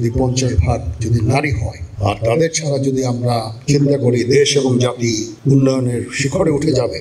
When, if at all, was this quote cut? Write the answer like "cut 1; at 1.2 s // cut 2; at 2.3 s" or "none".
cut 1; at 5.3 s